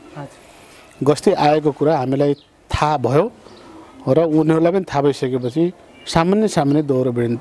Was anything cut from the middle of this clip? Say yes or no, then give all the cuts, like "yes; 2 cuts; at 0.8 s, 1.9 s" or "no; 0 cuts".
no; 0 cuts